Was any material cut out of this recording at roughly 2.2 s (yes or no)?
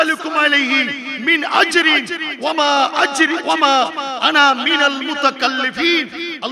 no